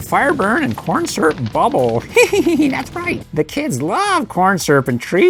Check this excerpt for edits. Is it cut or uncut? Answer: uncut